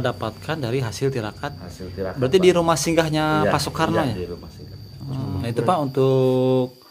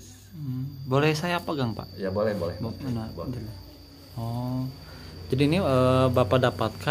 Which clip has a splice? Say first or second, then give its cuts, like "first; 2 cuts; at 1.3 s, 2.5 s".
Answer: first; 1 cut; at 5.4 s